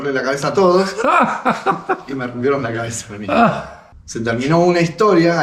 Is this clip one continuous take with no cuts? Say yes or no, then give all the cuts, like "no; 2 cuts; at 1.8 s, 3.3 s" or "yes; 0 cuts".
yes; 0 cuts